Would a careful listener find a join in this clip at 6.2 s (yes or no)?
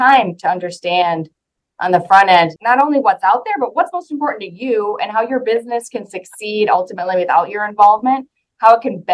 no